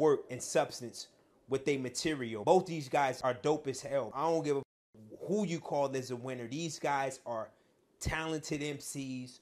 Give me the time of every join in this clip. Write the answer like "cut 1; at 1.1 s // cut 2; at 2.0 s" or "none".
cut 1; at 2.4 s // cut 2; at 3.2 s